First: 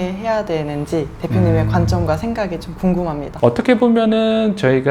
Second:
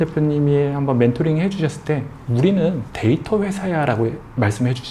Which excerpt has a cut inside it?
first; 1 cut; at 3.3 s

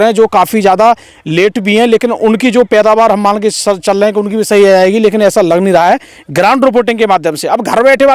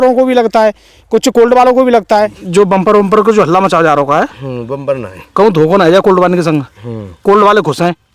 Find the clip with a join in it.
second; 1 cut; at 2.4 s

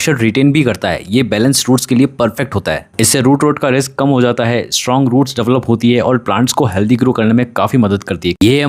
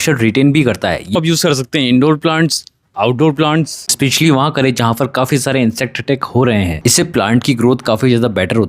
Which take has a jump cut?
second; 3 cuts; at 1.1 s, 3.9 s, 6.7 s

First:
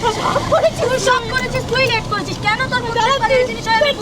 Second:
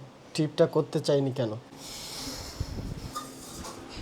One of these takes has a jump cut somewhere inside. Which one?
second; 1 cut; at 1.7 s

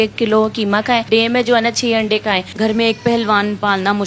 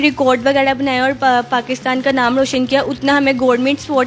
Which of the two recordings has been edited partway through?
first; 2 cuts; at 1.1 s, 2.5 s

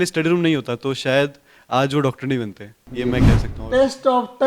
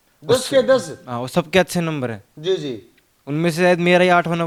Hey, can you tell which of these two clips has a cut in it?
first; 1 cut; at 3.5 s

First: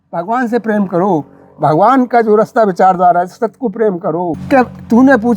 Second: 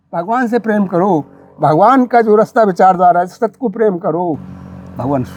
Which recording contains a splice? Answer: first; 1 cut; at 4.4 s

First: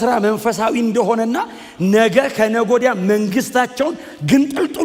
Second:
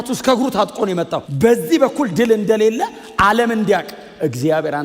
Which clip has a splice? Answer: second; 1 cut; at 1.2 s

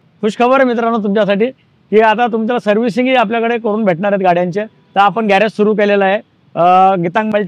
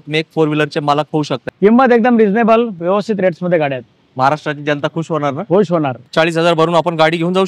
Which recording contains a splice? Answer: second; 2 cuts; at 1.4 s, 6.1 s

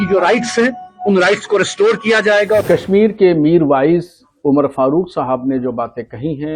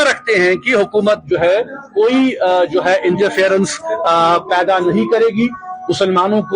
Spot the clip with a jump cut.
first; 1 cut; at 2.6 s

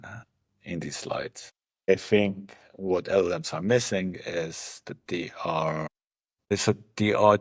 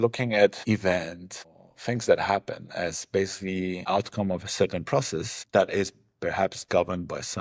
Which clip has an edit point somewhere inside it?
first; 1 cut; at 1.9 s

